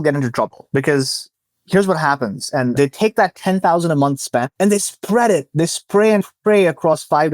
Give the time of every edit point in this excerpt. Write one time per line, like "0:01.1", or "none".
0:02.8
0:04.5